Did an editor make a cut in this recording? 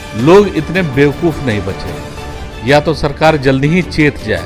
no; 0 cuts

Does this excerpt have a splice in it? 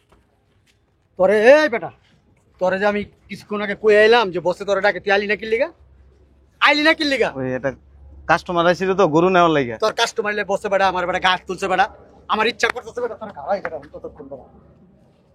no; 0 cuts

